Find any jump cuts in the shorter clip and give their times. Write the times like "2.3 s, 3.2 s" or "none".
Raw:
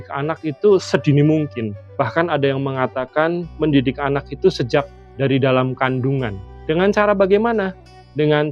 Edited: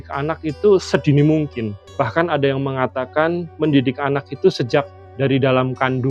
none